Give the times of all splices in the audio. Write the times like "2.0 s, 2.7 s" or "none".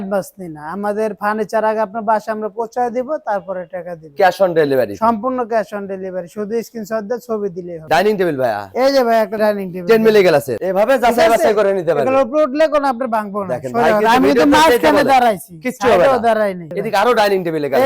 7.8 s, 10.5 s, 16.6 s